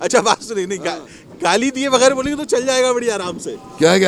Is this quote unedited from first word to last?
yes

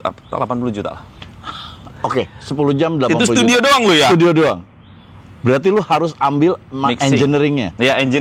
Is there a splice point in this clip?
no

